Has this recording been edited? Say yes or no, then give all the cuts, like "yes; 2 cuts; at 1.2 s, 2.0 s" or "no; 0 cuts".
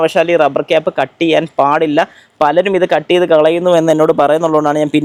no; 0 cuts